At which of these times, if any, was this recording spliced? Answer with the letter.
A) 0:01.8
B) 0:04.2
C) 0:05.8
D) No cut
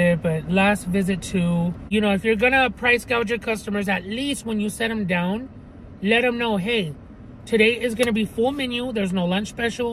A